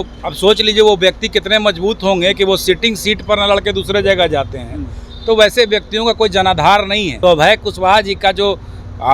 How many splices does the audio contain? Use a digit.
1